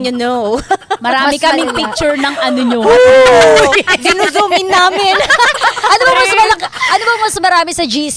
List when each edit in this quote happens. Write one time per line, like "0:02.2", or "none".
none